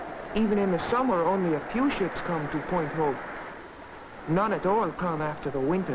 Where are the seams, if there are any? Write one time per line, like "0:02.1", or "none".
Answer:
0:03.4